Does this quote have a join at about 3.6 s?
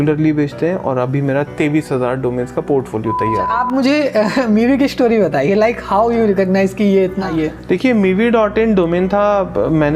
yes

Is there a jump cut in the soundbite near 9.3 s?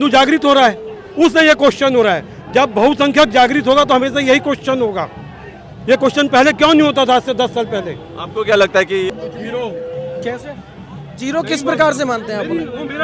yes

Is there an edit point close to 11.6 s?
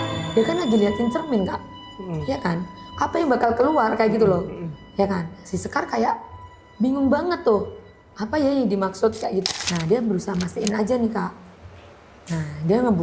no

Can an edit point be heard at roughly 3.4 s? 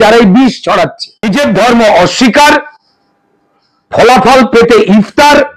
no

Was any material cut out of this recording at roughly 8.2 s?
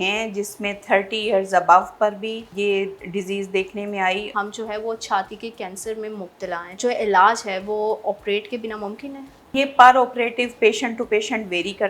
no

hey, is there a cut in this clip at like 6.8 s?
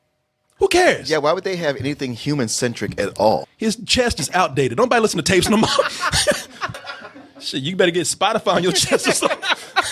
yes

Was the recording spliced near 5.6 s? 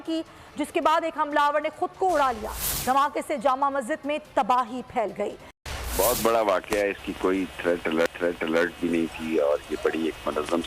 yes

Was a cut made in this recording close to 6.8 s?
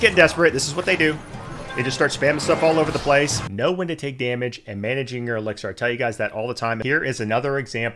yes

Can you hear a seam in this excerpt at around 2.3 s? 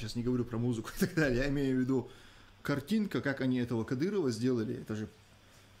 no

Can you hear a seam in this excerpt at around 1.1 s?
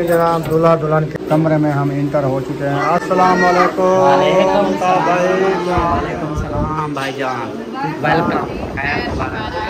yes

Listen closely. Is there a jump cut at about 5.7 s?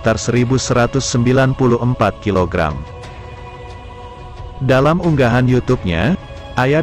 no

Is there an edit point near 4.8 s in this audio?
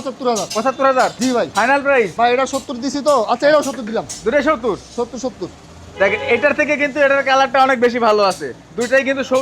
no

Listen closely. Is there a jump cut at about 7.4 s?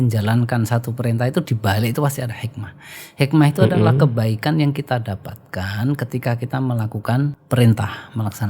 yes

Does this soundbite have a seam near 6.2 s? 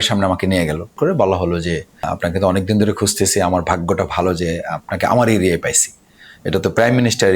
no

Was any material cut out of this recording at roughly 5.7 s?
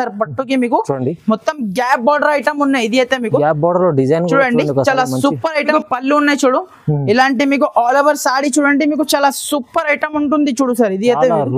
yes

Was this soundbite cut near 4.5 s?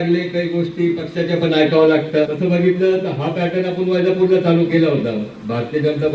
no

